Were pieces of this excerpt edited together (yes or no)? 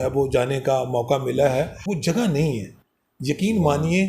yes